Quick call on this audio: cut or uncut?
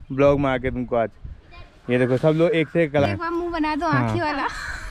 cut